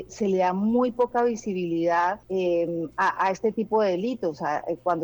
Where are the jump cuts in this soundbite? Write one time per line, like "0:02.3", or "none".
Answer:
0:02.2